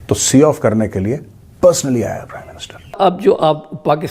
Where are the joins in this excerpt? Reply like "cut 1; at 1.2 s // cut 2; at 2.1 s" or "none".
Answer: cut 1; at 2.9 s